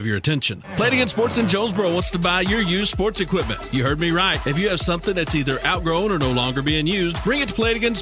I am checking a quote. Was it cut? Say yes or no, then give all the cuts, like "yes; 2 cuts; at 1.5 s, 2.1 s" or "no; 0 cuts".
no; 0 cuts